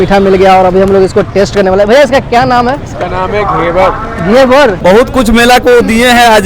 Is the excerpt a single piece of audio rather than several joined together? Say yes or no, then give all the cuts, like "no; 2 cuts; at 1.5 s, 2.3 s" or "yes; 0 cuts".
no; 1 cut; at 4.8 s